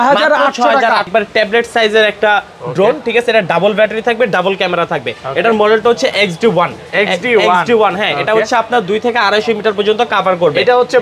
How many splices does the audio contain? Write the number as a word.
one